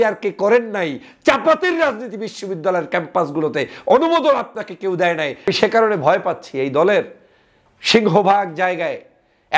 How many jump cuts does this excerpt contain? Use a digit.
1